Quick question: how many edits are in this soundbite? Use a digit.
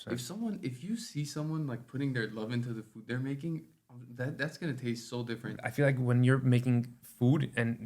1